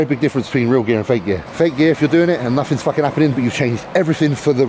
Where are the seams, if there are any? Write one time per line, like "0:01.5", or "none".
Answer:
0:01.5